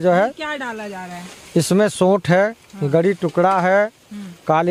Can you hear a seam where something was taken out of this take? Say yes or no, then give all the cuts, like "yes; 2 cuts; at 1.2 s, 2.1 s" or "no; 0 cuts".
no; 0 cuts